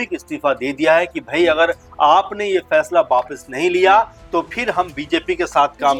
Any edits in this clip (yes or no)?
no